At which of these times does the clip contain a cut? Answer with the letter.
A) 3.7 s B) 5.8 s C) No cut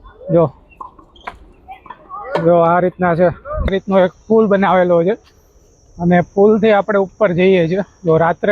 A